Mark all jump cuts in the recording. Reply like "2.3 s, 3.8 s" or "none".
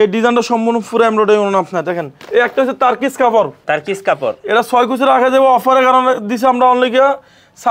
2.1 s, 3.6 s